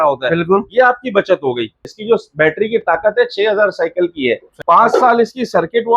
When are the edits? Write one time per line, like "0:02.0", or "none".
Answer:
0:01.9
0:04.6